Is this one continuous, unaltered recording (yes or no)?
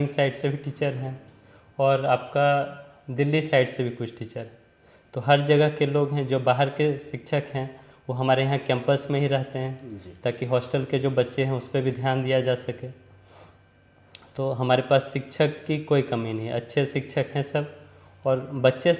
yes